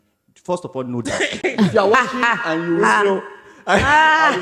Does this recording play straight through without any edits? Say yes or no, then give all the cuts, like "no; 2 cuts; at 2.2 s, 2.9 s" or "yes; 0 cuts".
yes; 0 cuts